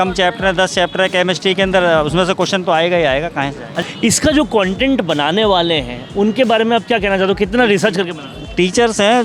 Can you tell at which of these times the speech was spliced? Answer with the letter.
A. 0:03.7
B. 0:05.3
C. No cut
A